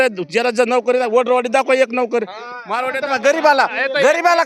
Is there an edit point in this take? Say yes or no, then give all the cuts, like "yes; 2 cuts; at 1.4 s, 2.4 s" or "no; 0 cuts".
no; 0 cuts